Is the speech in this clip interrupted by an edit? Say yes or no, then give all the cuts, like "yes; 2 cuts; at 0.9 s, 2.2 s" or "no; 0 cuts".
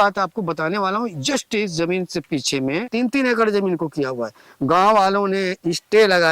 yes; 1 cut; at 2.9 s